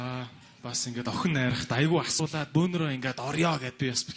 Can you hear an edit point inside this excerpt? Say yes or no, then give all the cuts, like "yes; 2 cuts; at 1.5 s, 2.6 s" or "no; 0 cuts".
no; 0 cuts